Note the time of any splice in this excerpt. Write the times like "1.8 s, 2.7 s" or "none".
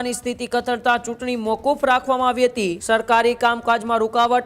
2.8 s

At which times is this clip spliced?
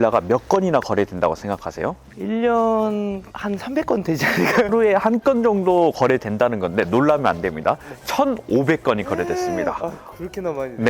2.1 s, 3.3 s

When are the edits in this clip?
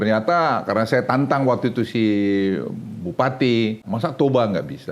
3.8 s

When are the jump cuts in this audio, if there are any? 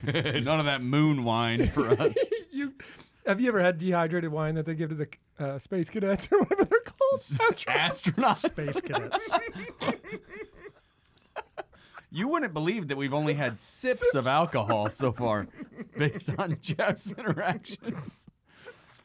none

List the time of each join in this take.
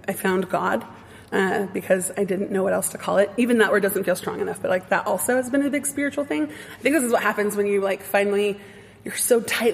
none

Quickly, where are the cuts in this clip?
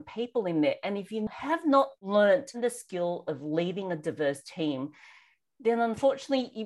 1.7 s, 2.6 s

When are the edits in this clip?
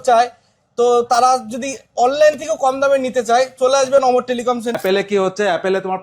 4.8 s

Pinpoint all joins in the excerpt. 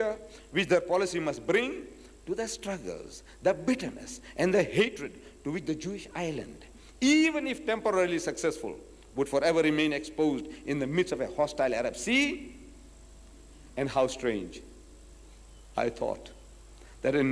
11.5 s

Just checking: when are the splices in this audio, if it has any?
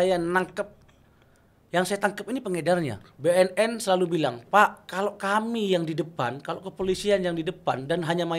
3.0 s

